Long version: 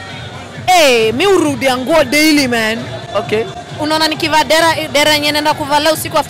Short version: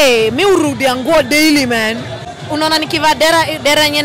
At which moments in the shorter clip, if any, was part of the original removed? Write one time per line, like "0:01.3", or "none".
0:02.2